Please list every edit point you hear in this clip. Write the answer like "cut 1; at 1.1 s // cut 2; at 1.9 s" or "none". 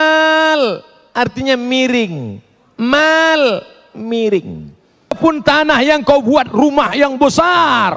cut 1; at 5.2 s